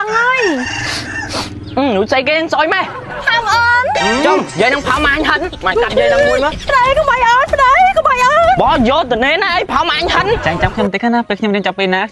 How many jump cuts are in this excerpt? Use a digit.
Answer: 1